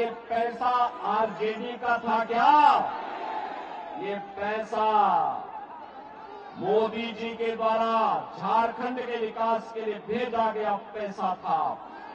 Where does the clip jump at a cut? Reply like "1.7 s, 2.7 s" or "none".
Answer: none